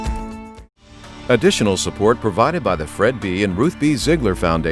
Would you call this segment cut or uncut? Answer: cut